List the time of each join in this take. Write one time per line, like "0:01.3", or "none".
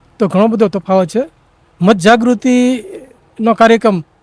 none